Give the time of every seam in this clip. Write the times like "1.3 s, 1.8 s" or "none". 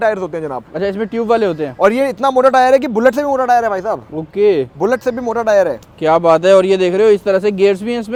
none